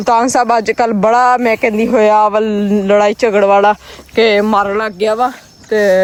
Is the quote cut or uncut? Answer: uncut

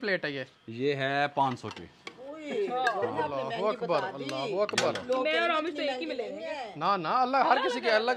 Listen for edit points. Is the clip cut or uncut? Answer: uncut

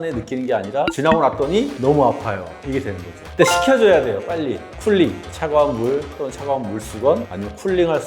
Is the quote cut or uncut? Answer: cut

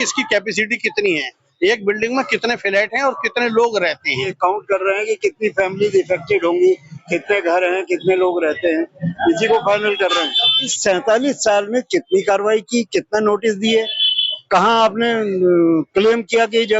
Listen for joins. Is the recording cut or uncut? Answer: cut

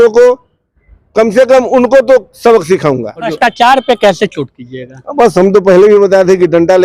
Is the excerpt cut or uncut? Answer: cut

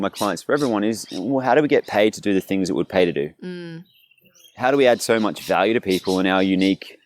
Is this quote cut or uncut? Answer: uncut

